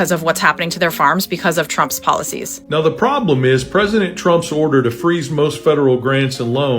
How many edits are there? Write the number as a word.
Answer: one